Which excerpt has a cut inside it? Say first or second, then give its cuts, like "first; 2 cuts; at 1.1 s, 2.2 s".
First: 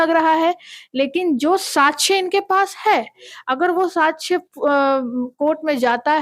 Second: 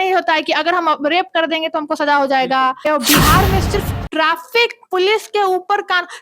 second; 1 cut; at 2.8 s